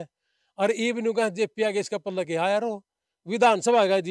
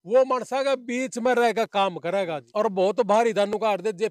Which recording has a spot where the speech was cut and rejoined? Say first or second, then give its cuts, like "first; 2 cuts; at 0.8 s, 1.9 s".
second; 1 cut; at 2.4 s